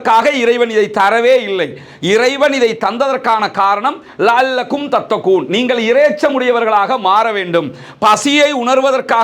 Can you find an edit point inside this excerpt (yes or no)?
no